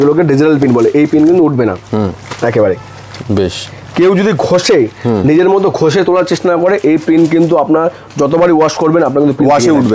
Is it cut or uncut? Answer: uncut